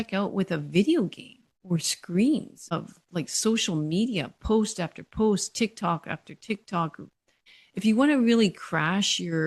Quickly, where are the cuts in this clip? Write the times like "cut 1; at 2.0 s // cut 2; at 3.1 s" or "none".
cut 1; at 2.6 s // cut 2; at 7.5 s